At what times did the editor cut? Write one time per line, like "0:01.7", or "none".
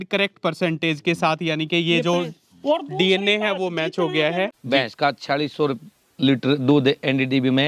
0:04.5